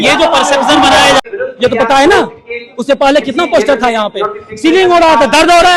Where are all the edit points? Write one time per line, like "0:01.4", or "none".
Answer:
0:01.2